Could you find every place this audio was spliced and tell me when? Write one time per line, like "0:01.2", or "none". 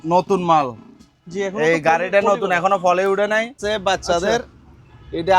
0:03.5